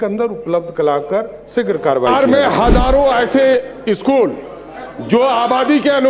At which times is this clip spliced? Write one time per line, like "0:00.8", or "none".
0:02.1